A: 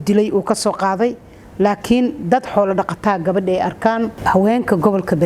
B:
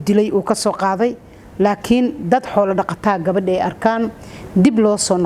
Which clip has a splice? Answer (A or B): A